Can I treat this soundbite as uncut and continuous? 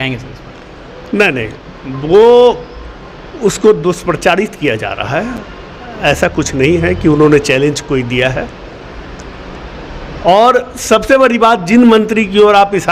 yes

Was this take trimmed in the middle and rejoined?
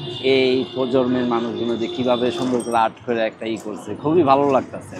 no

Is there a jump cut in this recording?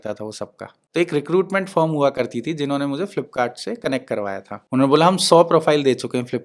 yes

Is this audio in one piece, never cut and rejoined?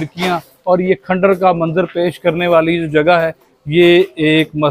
yes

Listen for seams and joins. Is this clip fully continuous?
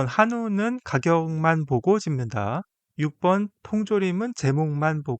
no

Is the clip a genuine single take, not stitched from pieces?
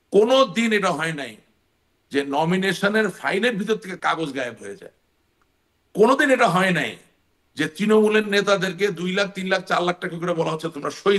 yes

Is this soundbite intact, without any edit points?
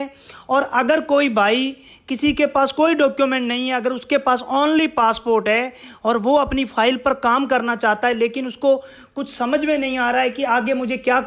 yes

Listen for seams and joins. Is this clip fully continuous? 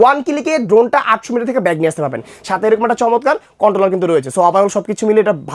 yes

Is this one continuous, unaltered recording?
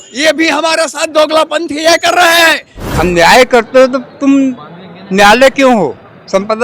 no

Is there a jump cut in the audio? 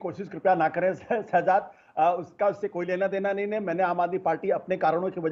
no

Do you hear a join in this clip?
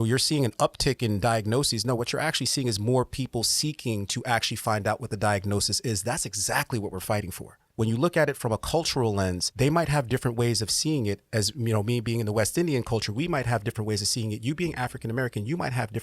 yes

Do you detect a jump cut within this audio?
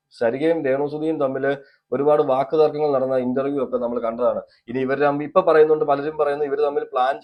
no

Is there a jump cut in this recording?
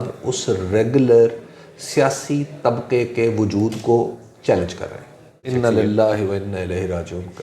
yes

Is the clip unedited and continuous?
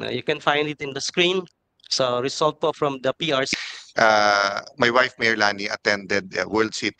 no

